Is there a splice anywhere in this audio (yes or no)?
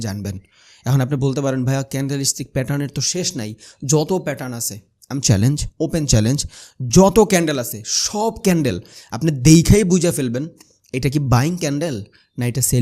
no